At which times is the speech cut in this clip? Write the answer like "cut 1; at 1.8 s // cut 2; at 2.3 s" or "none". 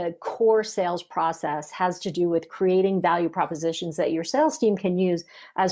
none